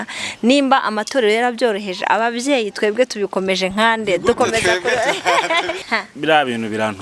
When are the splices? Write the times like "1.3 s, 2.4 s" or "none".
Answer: 5.8 s